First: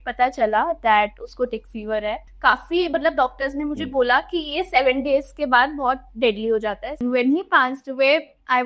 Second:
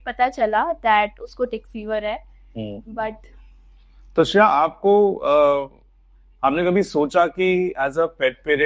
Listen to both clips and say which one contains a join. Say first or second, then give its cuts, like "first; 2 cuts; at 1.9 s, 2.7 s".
first; 2 cuts; at 2.3 s, 7.0 s